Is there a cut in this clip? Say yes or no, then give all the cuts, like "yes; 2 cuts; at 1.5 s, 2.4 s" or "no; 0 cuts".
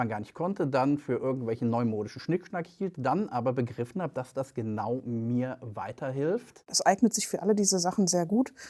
yes; 1 cut; at 6.6 s